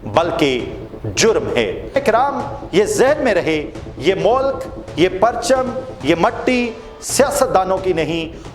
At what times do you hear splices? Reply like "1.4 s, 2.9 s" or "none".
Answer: 2.0 s